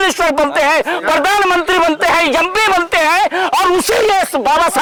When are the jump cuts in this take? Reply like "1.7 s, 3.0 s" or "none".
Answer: none